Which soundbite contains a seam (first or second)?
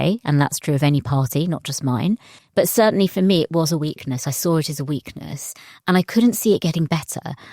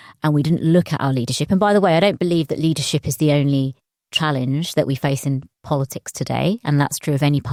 first